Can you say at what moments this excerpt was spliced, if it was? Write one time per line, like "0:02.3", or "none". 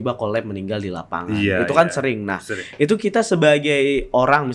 none